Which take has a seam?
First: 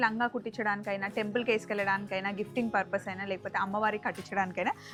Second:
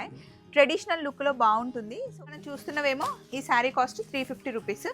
second; 1 cut; at 2.2 s

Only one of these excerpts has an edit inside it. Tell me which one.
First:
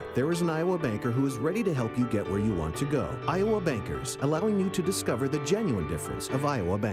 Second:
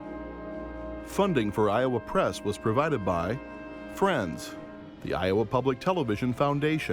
second; 1 cut; at 1.1 s

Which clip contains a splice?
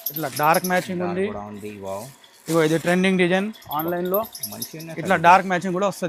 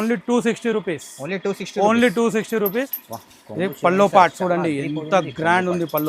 second; 1 cut; at 3.0 s

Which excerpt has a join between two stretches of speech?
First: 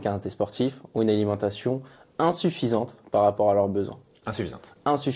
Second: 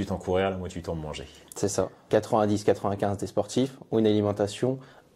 second; 1 cut; at 2.0 s

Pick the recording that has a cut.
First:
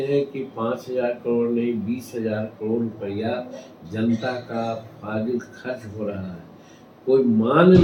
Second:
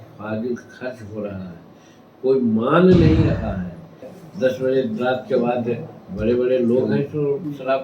second; 1 cut; at 4.2 s

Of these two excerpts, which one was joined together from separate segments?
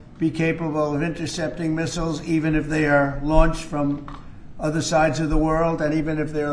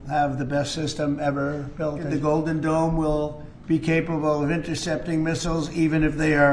second; 1 cut; at 2.1 s

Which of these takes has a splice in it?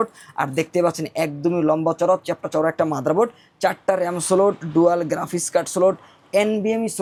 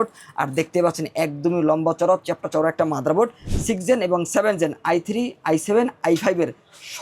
second; 1 cut; at 3.4 s

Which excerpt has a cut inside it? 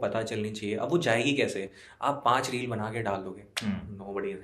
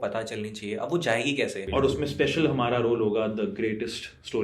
second; 1 cut; at 1.6 s

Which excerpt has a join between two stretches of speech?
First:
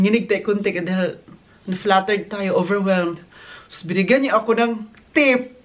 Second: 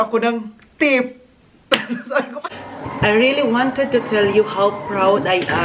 second; 1 cut; at 2.4 s

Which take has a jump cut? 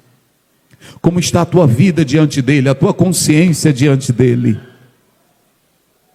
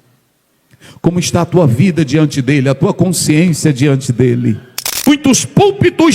second; 1 cut; at 5.1 s

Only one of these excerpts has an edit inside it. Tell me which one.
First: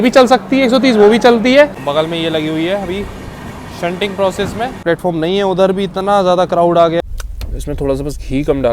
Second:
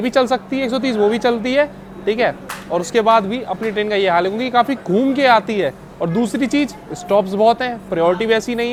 first; 3 cuts; at 1.8 s, 4.8 s, 7.0 s

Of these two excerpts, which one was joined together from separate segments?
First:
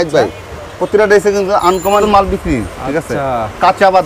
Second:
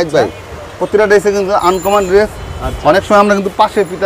first; 1 cut; at 2.0 s

